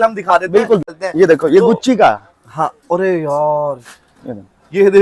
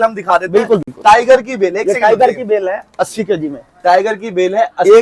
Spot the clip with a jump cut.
first; 1 cut; at 0.9 s

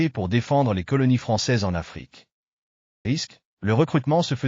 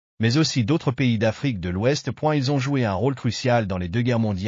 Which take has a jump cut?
first; 1 cut; at 3.0 s

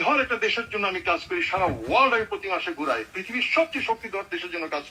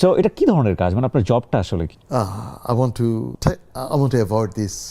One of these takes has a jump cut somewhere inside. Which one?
second; 2 cuts; at 2.0 s, 3.3 s

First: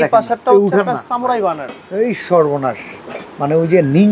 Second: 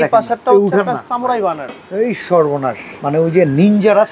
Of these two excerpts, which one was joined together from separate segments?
second; 1 cut; at 2.9 s

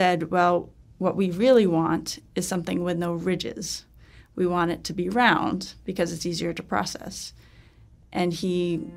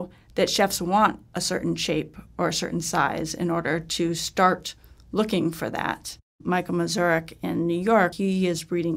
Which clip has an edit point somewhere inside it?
second; 2 cuts; at 6.4 s, 8.1 s

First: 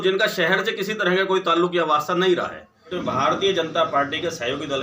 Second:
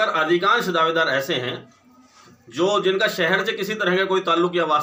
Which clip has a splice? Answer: first; 1 cut; at 3.0 s

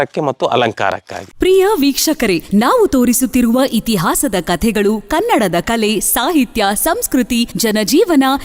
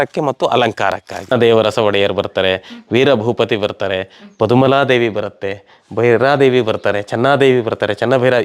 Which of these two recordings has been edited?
second; 1 cut; at 1.1 s

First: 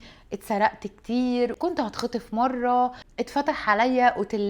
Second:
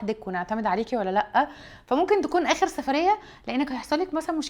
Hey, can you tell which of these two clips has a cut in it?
first; 2 cuts; at 1.6 s, 3.0 s

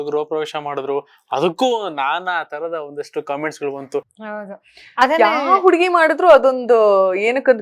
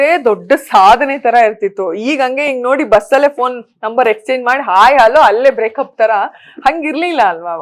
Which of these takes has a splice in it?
first; 1 cut; at 4.1 s

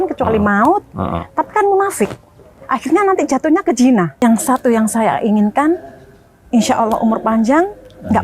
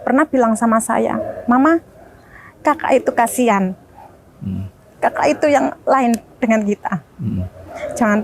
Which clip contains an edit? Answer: first; 1 cut; at 4.1 s

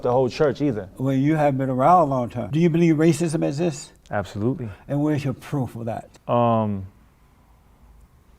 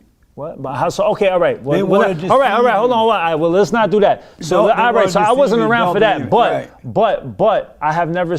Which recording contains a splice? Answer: first; 2 cuts; at 2.4 s, 6.1 s

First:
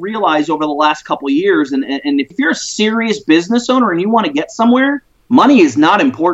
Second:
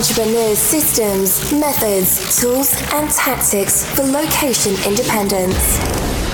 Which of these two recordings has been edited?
first; 2 cuts; at 2.3 s, 5.1 s

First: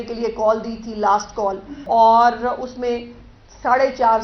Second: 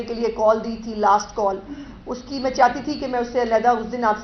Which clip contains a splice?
first; 1 cut; at 1.7 s

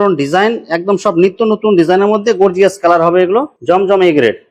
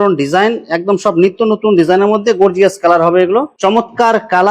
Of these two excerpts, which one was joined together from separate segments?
second; 1 cut; at 3.5 s

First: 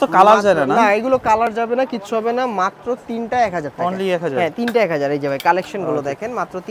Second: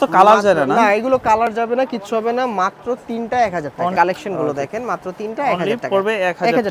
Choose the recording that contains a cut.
second; 1 cut; at 3.9 s

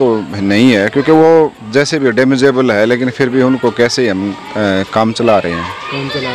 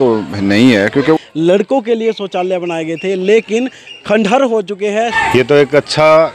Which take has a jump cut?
second; 2 cuts; at 1.2 s, 5.2 s

